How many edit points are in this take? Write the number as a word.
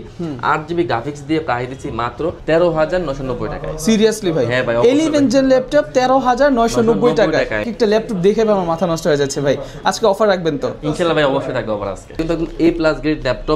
three